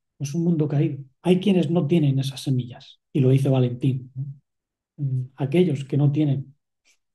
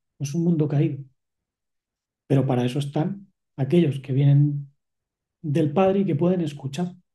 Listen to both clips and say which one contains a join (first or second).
first